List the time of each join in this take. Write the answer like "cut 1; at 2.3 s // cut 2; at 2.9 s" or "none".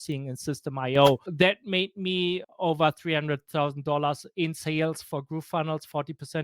cut 1; at 1.3 s // cut 2; at 2.5 s